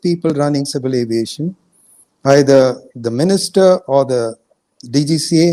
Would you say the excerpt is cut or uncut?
uncut